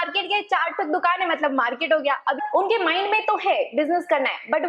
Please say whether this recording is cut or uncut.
cut